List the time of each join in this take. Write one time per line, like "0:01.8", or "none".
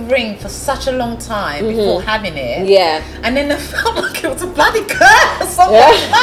none